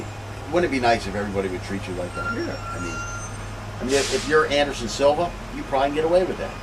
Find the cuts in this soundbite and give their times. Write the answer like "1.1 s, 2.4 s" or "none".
none

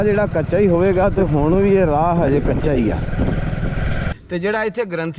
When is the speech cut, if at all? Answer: 4.1 s

